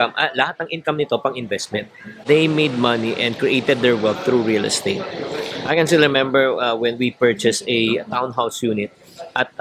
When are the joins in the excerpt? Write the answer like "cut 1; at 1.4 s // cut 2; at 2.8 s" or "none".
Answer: cut 1; at 2.1 s